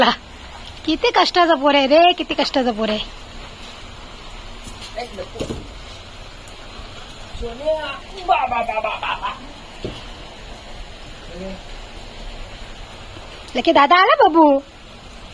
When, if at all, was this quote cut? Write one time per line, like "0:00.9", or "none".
none